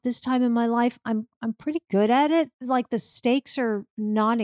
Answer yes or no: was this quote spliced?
yes